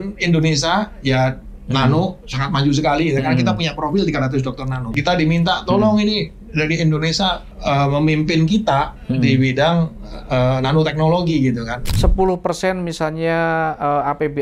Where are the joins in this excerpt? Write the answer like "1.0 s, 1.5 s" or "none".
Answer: 4.9 s, 7.5 s, 11.8 s